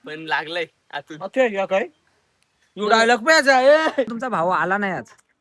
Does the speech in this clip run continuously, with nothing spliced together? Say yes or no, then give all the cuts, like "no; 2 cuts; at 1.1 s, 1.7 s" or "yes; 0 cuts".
no; 1 cut; at 4.2 s